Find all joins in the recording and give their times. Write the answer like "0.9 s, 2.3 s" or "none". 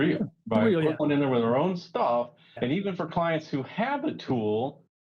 1.0 s, 2.6 s